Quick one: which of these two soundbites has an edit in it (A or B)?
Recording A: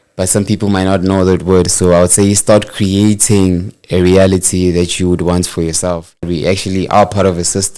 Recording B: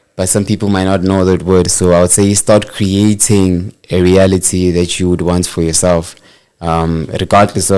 A